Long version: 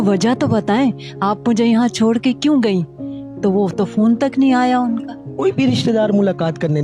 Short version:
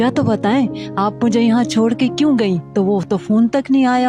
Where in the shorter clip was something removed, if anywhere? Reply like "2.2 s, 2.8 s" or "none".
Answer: 2.6 s